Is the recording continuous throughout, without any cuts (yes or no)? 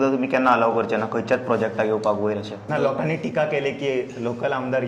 no